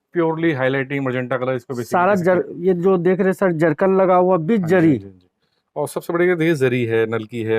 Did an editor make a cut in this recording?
no; 0 cuts

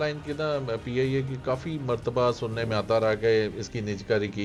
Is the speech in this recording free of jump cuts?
yes; 0 cuts

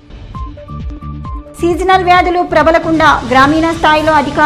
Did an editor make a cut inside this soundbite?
yes; 1 cut; at 1.0 s

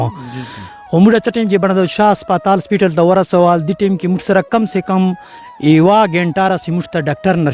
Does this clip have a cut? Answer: no; 0 cuts

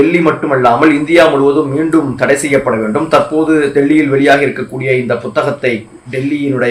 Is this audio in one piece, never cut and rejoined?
yes; 0 cuts

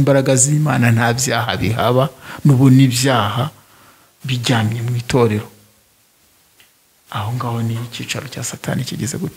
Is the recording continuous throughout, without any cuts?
yes; 0 cuts

